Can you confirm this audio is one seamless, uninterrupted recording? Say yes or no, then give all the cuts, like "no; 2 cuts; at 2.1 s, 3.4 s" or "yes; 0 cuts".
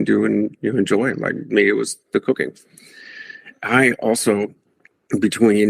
yes; 0 cuts